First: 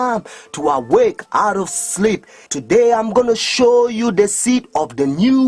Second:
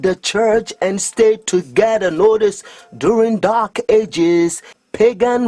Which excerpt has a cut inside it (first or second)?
second